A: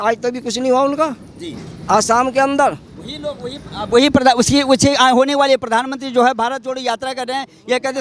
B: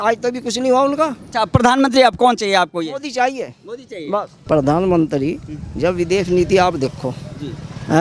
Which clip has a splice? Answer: B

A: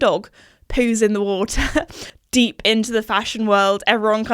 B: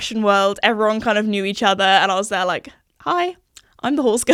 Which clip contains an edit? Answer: A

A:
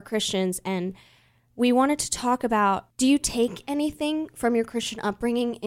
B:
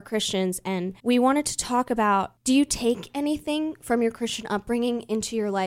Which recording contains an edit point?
B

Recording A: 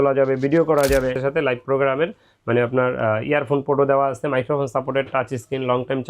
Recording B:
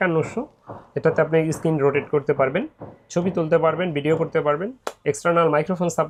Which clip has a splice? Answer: A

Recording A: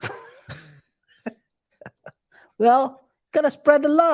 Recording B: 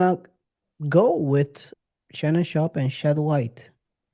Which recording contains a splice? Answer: B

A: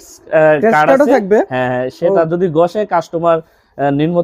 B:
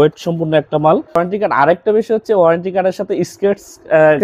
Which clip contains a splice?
B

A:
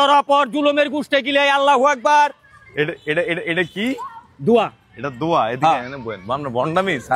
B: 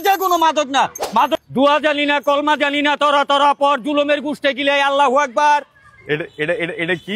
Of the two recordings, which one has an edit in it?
B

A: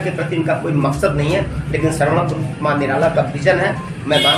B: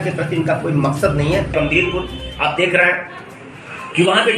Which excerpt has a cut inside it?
B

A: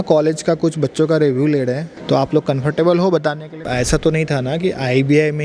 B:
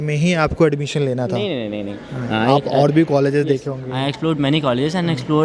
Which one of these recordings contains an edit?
A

